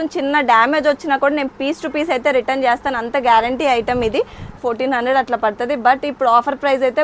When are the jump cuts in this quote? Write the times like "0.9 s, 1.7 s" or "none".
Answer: 4.6 s